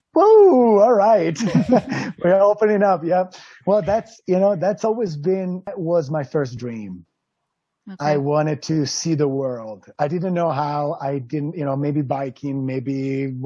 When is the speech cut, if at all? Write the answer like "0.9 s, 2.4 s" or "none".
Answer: 5.7 s